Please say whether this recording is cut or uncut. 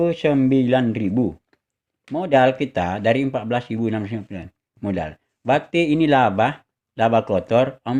uncut